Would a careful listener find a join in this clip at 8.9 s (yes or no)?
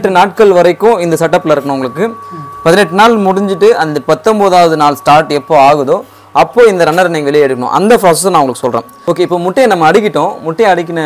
yes